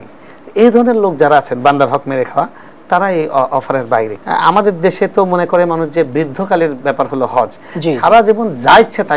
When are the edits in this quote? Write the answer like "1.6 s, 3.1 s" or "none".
4.2 s